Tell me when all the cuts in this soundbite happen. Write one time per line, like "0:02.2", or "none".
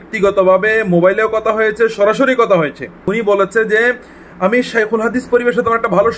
0:03.1